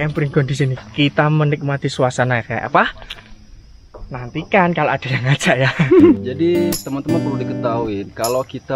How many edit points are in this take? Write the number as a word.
one